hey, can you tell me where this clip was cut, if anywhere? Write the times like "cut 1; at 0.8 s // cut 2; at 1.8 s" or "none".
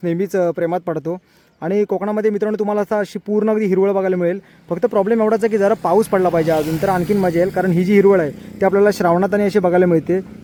none